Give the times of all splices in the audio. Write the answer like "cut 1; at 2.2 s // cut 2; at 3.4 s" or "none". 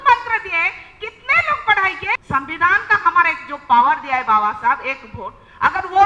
cut 1; at 2.2 s